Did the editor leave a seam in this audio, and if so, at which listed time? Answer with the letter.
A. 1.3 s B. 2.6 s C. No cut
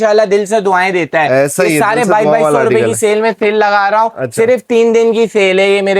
C